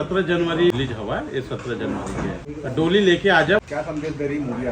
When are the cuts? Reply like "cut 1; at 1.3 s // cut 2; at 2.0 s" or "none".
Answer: cut 1; at 0.7 s // cut 2; at 2.5 s // cut 3; at 3.6 s